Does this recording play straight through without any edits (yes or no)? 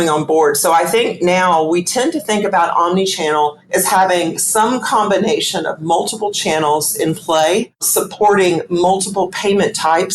no